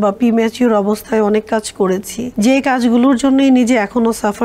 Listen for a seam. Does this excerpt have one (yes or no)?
yes